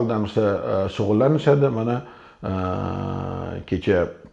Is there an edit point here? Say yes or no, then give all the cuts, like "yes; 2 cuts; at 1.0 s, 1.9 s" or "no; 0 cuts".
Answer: no; 0 cuts